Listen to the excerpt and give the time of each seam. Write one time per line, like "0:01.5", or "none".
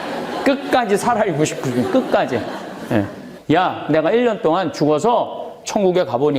0:03.3